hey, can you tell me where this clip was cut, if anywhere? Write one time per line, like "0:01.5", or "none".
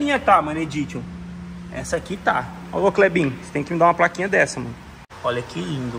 0:05.0